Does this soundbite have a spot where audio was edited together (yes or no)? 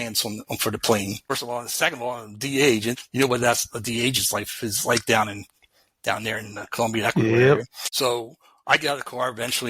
yes